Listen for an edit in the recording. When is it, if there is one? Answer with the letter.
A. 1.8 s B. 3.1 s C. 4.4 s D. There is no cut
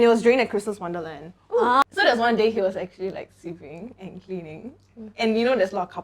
A